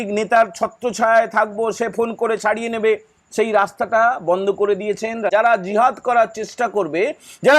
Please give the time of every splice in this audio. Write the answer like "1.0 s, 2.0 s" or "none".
5.3 s